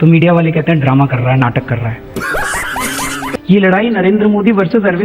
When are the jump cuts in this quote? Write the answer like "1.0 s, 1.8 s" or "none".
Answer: 3.3 s